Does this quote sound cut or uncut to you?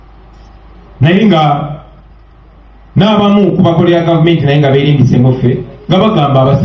uncut